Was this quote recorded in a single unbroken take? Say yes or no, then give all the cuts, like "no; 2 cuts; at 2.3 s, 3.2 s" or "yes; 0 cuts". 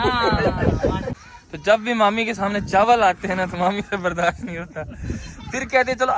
no; 1 cut; at 1.1 s